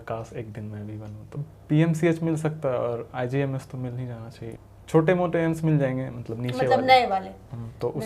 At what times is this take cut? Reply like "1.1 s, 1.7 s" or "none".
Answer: 1.4 s, 4.5 s